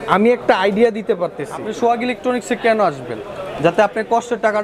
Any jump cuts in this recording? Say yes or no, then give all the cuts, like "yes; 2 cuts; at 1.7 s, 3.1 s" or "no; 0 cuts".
yes; 1 cut; at 1.7 s